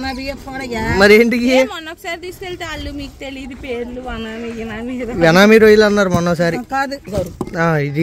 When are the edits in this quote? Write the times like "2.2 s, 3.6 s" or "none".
7.1 s